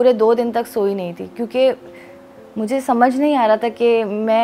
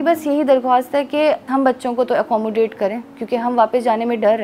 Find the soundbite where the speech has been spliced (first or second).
second